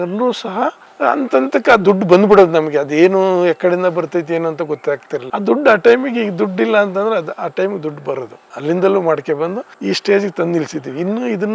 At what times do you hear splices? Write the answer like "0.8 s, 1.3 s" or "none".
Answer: 0.9 s, 9.7 s